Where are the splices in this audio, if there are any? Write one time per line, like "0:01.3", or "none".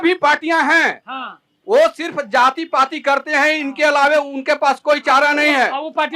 none